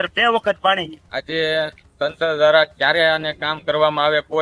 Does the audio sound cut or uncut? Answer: cut